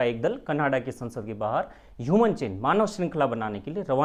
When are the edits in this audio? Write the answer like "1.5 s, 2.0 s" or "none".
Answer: none